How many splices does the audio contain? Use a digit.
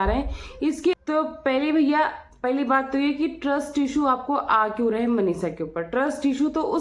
1